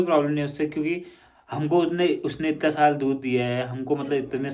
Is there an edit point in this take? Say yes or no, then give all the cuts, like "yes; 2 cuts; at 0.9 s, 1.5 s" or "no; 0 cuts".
no; 0 cuts